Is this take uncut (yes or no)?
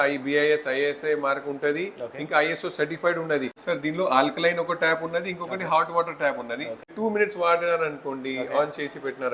no